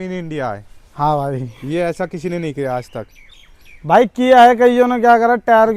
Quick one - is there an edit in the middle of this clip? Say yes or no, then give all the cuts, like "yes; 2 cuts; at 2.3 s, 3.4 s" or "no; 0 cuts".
no; 0 cuts